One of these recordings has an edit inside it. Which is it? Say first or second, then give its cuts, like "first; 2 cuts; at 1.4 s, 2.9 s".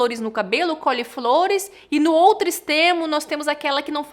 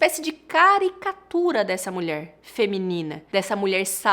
second; 1 cut; at 3.2 s